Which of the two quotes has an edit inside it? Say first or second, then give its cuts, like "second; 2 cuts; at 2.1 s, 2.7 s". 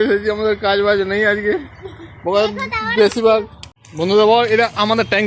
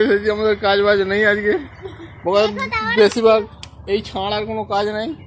first; 1 cut; at 3.8 s